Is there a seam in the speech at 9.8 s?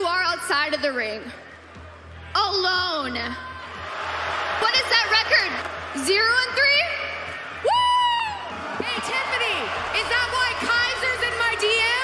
no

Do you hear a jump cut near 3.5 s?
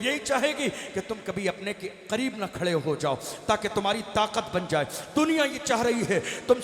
no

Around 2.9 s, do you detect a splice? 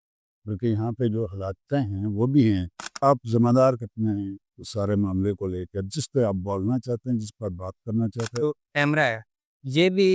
yes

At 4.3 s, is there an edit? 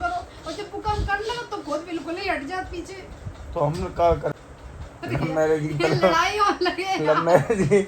yes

